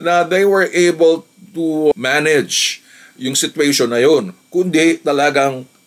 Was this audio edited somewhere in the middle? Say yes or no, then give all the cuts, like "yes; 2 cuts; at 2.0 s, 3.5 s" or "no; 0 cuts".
no; 0 cuts